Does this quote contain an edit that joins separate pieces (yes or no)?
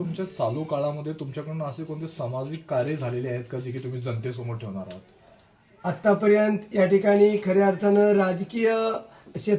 no